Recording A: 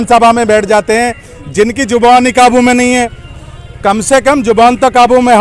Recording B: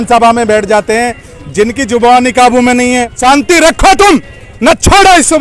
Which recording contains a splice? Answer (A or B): B